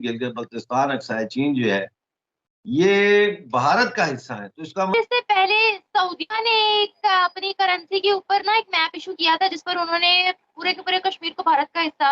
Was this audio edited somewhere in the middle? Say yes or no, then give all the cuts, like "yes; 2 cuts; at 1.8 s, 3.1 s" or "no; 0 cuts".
yes; 1 cut; at 4.9 s